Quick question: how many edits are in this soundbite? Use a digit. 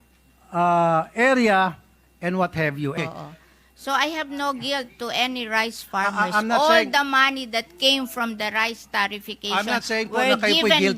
1